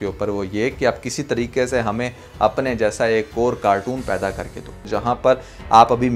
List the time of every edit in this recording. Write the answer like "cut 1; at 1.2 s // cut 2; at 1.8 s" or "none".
cut 1; at 4.8 s